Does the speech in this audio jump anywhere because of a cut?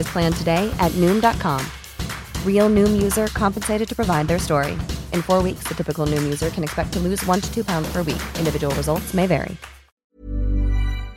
yes; 1 cut; at 10.0 s

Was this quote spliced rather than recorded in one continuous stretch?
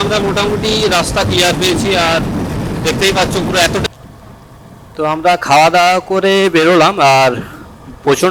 yes; 1 cut; at 3.8 s

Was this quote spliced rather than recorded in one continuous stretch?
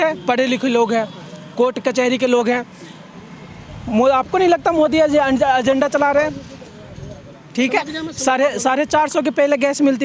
no; 0 cuts

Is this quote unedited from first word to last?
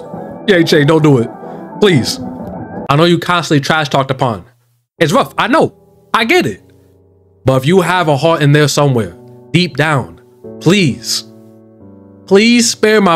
yes; 0 cuts

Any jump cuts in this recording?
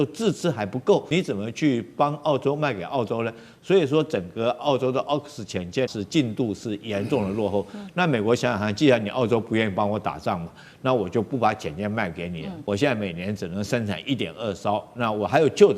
yes; 3 cuts; at 1.1 s, 5.9 s, 12.5 s

